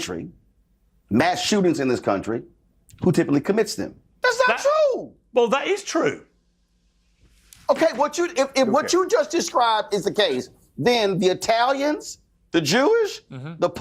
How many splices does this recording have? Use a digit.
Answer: 1